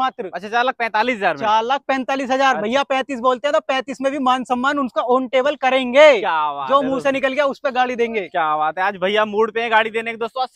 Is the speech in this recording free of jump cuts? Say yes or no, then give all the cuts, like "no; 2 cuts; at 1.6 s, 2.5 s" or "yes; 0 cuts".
yes; 0 cuts